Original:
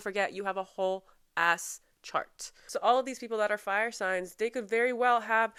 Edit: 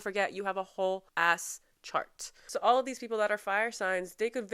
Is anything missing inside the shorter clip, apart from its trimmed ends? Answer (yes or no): yes